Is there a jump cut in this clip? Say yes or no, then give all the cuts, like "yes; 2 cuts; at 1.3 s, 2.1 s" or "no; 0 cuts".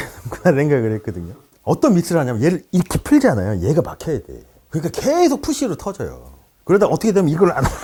no; 0 cuts